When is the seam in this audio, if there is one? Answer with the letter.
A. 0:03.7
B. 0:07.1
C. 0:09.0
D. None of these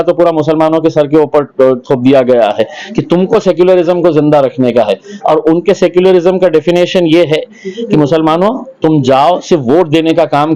D